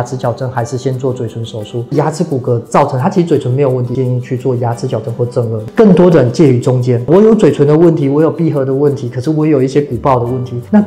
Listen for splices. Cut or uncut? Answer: cut